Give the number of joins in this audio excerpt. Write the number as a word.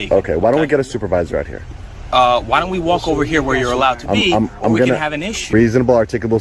one